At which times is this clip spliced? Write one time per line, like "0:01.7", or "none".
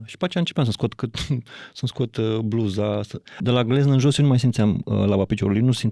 0:03.4